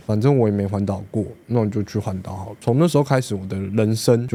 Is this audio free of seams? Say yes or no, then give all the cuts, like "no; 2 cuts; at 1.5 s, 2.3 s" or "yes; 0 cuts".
yes; 0 cuts